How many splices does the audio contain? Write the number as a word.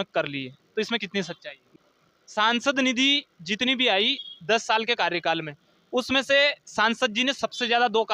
one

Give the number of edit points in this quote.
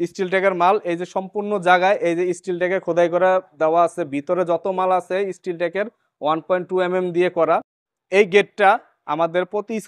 one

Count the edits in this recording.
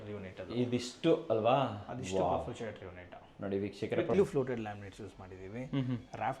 one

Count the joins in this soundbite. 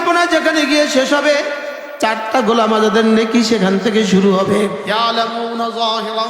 one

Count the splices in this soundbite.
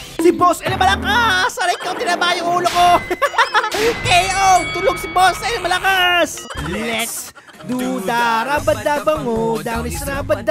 one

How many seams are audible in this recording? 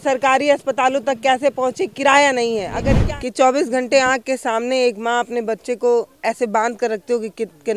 one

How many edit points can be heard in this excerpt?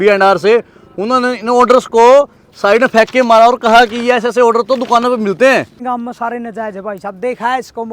one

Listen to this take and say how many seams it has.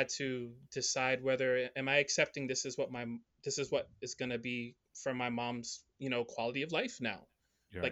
zero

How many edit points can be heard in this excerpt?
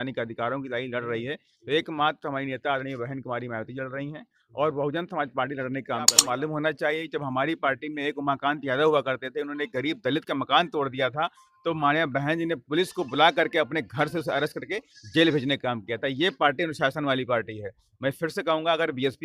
one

